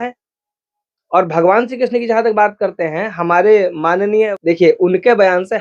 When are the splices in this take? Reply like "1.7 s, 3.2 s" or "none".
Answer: 4.3 s